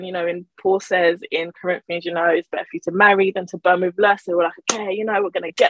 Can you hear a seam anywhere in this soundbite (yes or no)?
no